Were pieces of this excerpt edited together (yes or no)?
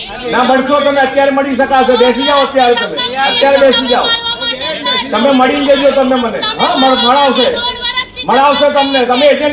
no